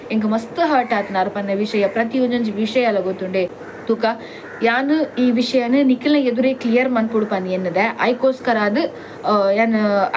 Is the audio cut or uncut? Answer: cut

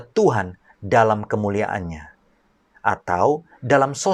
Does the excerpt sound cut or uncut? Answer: uncut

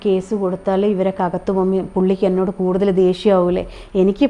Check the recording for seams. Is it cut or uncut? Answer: uncut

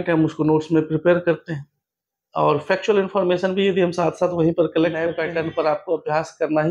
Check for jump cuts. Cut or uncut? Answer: cut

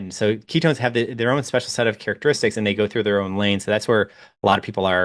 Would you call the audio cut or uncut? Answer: uncut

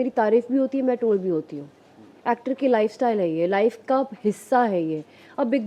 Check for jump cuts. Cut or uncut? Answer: uncut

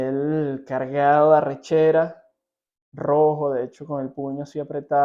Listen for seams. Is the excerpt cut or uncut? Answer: uncut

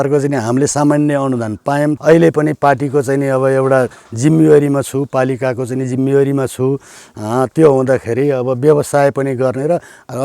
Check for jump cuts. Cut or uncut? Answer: cut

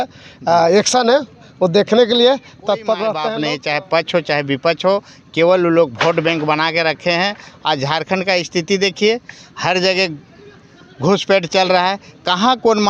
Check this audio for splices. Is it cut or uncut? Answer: cut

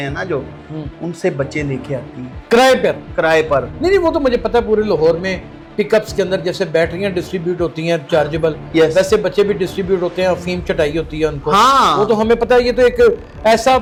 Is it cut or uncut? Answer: uncut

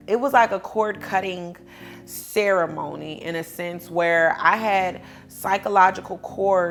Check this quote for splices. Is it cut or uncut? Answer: uncut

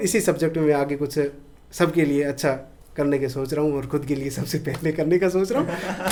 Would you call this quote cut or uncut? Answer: uncut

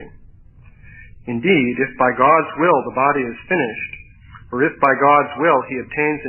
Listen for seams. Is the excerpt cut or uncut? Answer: cut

